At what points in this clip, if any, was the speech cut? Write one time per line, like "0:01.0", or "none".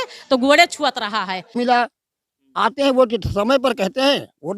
0:01.5